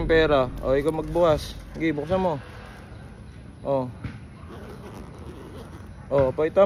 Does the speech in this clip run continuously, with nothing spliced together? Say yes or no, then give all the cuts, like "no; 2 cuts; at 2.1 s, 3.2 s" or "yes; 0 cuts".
yes; 0 cuts